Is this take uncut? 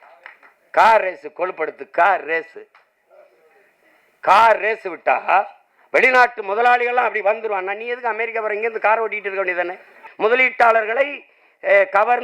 no; 1 cut; at 10.0 s

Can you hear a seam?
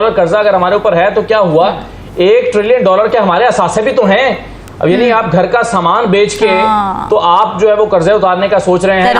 no; 0 cuts

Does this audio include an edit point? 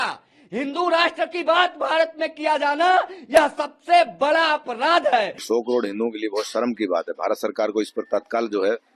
yes; 1 cut; at 5.4 s

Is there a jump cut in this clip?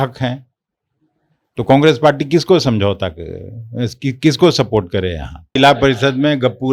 yes; 1 cut; at 5.5 s

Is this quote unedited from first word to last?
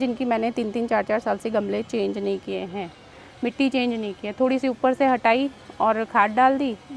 yes; 0 cuts

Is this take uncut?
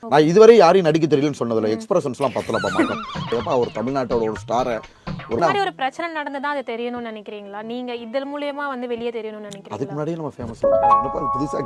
no; 1 cut; at 5.4 s

